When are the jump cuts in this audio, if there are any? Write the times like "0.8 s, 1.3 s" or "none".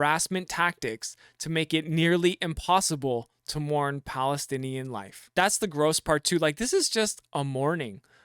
5.3 s